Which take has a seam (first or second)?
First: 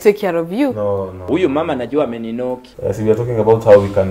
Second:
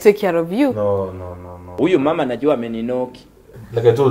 first